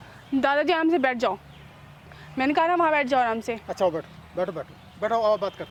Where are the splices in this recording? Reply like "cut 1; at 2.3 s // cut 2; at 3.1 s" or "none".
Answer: none